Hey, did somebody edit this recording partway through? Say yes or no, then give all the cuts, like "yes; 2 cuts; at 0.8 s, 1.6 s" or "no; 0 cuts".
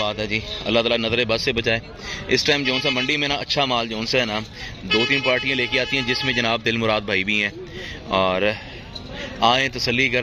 no; 0 cuts